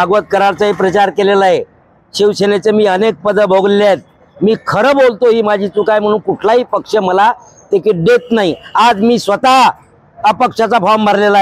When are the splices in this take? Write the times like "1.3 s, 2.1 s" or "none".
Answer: none